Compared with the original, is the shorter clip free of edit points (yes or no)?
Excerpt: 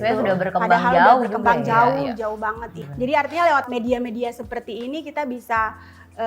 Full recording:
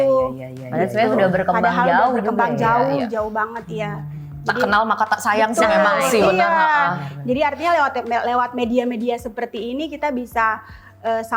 no